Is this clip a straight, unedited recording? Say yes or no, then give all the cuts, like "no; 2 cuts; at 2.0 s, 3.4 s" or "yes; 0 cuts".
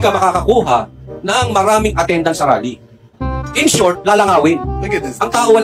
yes; 0 cuts